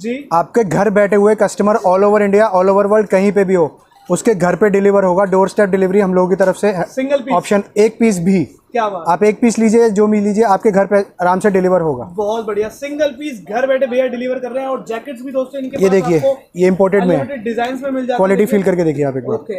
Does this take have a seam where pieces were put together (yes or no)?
no